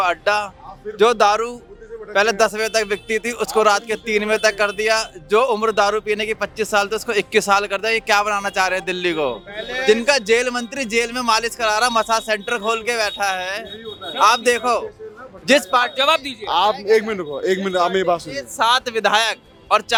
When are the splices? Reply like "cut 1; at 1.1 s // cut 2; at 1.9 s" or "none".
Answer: none